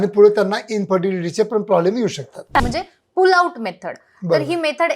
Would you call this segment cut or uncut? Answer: cut